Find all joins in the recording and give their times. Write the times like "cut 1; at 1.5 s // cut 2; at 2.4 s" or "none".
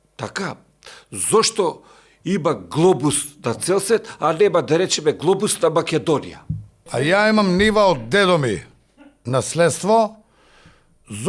cut 1; at 7.1 s

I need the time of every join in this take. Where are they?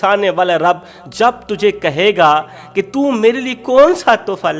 none

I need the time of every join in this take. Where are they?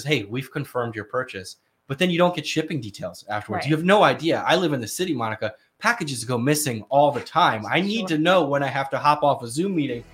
none

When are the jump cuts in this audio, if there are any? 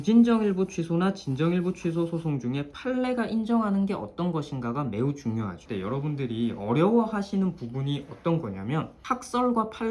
cut 1; at 5.6 s // cut 2; at 9.0 s

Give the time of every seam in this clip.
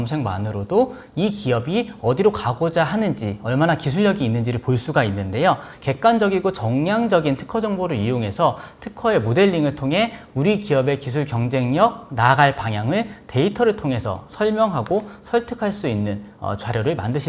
cut 1; at 5.7 s // cut 2; at 10.2 s

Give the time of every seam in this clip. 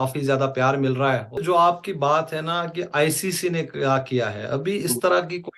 cut 1; at 1.4 s

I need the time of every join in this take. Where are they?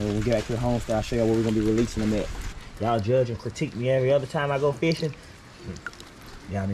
cut 1; at 2.6 s

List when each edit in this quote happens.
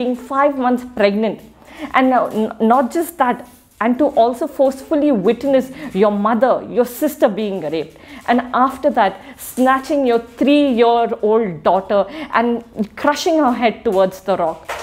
none

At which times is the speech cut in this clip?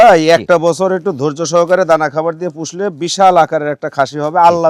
none

